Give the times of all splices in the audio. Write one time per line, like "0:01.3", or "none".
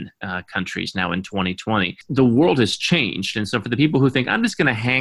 0:02.0